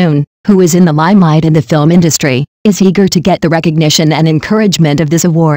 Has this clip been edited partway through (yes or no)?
no